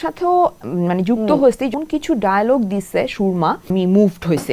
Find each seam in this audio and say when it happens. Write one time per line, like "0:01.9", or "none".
0:01.7
0:03.7